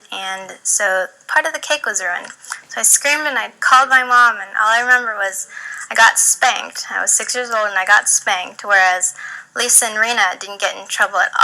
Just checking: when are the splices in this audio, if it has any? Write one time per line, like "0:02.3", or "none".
0:02.9